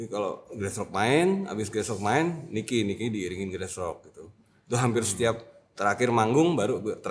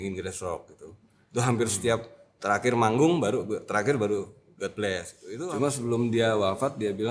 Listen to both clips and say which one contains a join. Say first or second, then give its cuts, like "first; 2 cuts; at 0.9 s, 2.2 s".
second; 1 cut; at 5.2 s